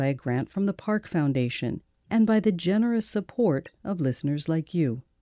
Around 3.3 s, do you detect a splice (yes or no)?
no